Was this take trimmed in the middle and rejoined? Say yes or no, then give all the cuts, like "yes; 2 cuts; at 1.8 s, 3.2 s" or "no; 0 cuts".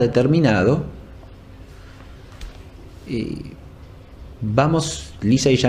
yes; 1 cut; at 3.1 s